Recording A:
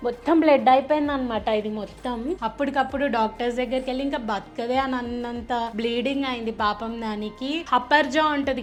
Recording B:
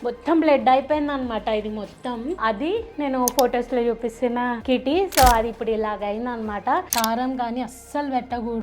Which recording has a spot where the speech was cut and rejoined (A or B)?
B